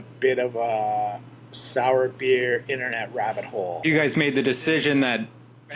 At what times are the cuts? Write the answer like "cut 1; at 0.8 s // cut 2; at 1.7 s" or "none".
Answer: cut 1; at 3.8 s